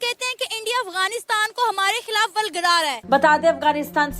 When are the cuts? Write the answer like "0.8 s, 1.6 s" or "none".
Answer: 3.0 s